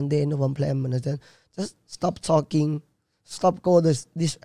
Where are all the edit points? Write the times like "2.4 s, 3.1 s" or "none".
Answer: none